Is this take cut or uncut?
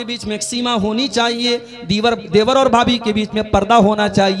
uncut